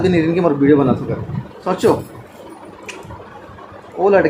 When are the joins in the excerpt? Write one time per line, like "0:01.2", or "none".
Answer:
none